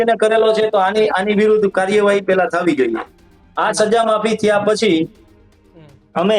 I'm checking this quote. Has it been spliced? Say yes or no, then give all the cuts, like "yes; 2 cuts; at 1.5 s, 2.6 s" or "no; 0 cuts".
no; 0 cuts